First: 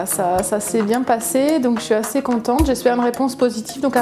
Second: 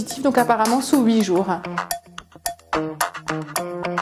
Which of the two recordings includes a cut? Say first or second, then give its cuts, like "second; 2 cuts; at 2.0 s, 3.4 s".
second; 1 cut; at 1.6 s